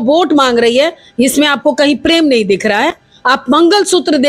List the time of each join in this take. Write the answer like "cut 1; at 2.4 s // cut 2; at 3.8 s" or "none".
none